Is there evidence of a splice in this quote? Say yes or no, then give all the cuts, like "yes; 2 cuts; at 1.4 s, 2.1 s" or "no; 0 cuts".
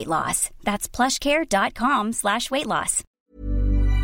yes; 1 cut; at 3.1 s